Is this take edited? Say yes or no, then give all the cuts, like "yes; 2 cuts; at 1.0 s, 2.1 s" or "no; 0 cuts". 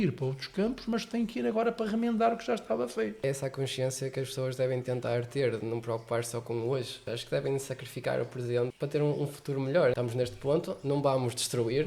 yes; 4 cuts; at 3.2 s, 7.0 s, 8.7 s, 9.9 s